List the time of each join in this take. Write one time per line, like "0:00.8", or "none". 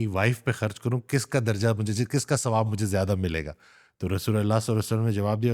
none

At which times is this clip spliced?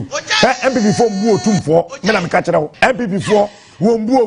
0:02.7

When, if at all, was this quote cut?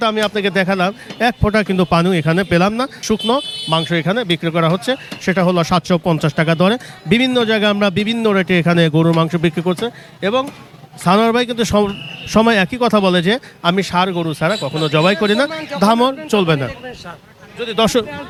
none

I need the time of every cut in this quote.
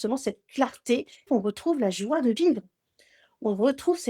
0:01.3

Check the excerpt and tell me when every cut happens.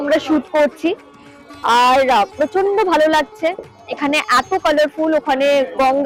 none

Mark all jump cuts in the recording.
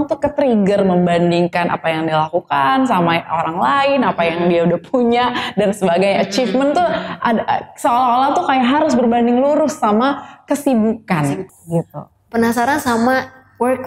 0:11.5

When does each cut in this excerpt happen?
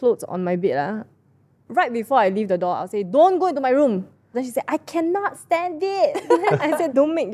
0:04.4

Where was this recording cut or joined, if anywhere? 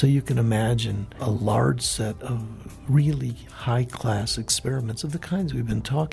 0:01.2

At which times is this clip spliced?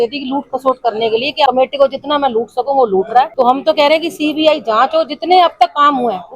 0:01.5
0:03.3

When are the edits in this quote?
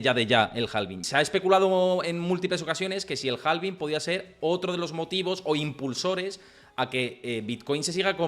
0:01.0

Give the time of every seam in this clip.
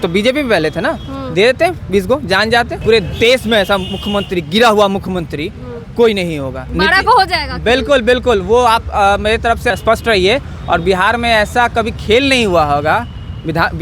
0:02.8
0:06.6
0:09.7

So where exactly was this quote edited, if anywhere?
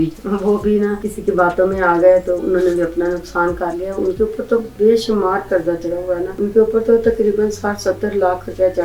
0:01.1
0:06.3

